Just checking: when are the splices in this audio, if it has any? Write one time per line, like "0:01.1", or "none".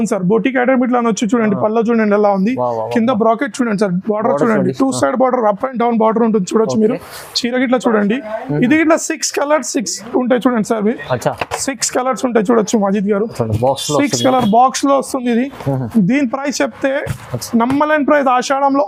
none